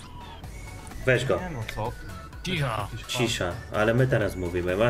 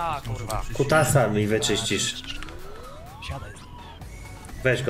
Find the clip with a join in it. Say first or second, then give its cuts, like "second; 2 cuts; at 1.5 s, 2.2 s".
first; 1 cut; at 2.3 s